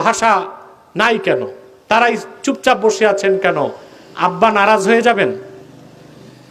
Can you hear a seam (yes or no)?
no